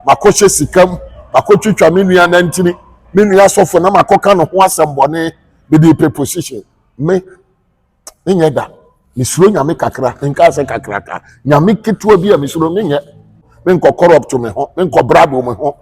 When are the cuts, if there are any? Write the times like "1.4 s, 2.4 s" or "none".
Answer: 13.5 s